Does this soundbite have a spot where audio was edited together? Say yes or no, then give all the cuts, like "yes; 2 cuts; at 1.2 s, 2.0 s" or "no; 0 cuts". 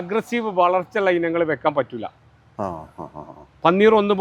no; 0 cuts